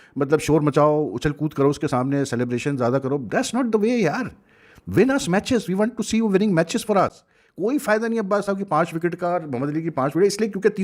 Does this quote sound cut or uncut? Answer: uncut